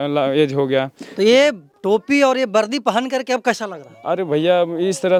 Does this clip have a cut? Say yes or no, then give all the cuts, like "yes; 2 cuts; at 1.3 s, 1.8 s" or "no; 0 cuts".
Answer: no; 0 cuts